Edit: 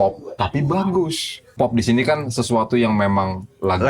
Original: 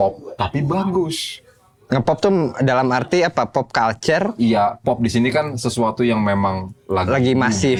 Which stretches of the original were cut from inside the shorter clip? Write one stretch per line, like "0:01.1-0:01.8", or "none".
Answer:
0:01.5-0:04.8